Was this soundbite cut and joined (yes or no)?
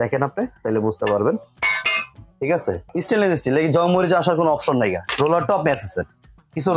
yes